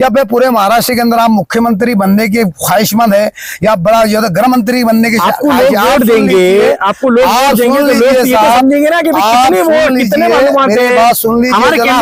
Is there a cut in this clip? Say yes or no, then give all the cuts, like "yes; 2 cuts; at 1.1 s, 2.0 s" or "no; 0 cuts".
no; 0 cuts